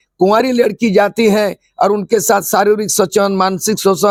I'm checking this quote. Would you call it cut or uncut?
uncut